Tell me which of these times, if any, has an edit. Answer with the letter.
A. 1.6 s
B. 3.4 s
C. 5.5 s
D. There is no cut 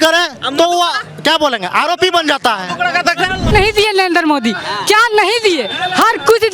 B